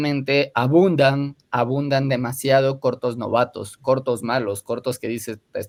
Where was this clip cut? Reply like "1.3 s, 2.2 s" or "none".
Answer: none